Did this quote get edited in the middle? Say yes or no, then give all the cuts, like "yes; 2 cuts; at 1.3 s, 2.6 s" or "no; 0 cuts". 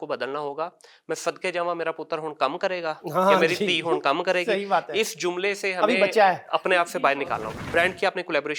yes; 1 cut; at 7.5 s